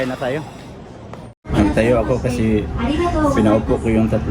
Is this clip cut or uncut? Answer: cut